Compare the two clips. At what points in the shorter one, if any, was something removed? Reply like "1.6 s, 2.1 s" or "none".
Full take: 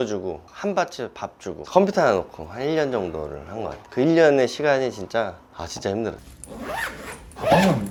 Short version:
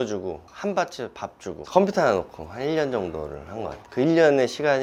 none